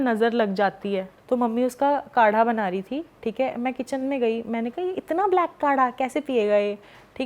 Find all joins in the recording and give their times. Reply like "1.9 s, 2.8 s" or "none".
1.1 s